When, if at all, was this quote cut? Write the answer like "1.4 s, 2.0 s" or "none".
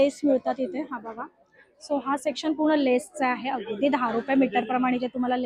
none